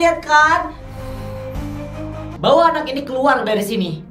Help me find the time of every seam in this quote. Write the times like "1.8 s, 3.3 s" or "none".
2.3 s